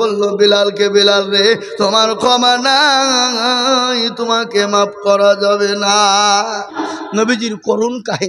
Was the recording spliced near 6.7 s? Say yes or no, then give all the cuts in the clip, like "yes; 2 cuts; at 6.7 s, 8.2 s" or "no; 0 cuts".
yes; 1 cut; at 6.7 s